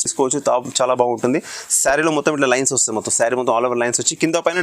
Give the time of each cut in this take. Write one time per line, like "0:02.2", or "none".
none